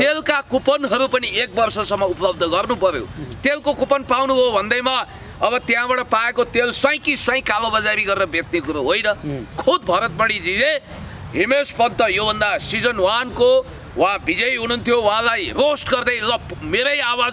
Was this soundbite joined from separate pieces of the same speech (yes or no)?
yes